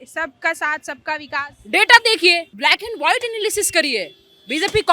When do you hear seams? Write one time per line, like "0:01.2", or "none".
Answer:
0:02.5

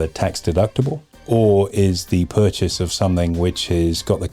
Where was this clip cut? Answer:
0:01.1

